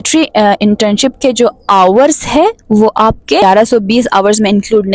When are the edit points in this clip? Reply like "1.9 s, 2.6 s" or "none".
3.4 s